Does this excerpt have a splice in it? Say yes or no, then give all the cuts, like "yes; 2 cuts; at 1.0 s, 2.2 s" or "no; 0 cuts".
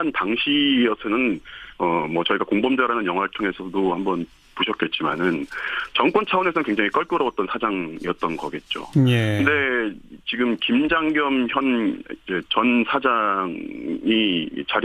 no; 0 cuts